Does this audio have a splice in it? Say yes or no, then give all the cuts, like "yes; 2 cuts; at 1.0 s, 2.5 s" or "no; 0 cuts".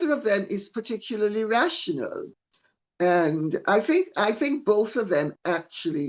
no; 0 cuts